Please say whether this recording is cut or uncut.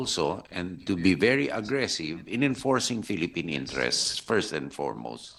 uncut